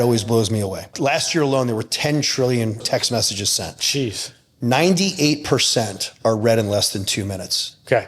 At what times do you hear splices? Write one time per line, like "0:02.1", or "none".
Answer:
0:00.9
0:02.8